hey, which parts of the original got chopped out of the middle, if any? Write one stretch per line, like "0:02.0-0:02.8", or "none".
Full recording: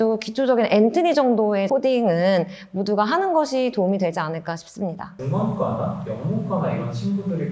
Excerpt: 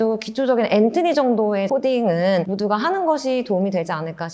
0:02.5-0:02.8